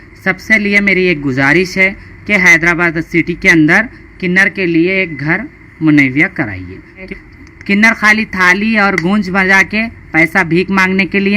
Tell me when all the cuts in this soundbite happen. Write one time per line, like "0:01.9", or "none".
0:07.0